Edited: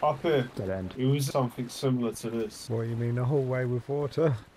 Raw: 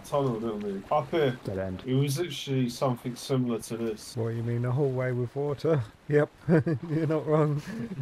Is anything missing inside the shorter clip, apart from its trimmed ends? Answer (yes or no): yes